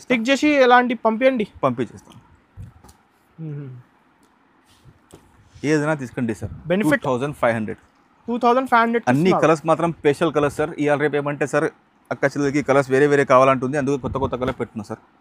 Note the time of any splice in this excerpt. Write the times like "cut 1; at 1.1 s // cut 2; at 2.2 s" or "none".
none